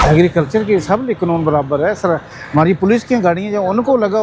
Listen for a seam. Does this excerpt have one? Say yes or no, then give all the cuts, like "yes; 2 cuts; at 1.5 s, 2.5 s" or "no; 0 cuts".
no; 0 cuts